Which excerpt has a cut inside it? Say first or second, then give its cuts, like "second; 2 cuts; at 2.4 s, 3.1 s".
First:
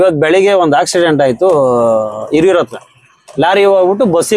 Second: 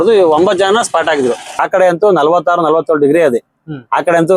second; 1 cut; at 1.6 s